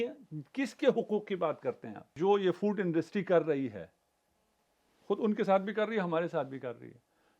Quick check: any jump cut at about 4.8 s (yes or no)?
no